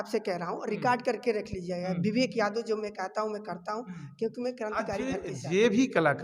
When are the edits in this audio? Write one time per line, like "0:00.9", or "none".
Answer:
0:05.0